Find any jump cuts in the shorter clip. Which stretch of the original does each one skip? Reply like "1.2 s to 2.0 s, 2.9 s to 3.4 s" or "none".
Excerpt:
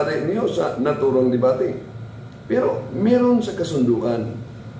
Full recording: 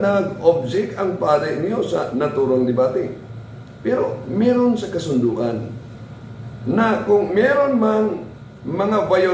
none